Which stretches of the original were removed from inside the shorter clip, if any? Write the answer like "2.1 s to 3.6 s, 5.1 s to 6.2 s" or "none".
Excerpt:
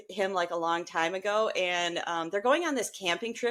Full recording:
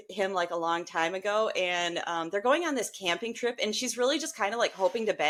none